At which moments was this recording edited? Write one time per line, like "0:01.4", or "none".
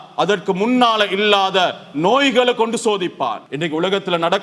0:03.4